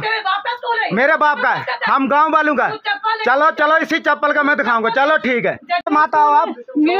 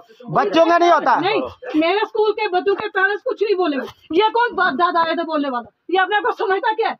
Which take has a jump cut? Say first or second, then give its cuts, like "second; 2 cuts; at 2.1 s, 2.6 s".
first; 1 cut; at 5.8 s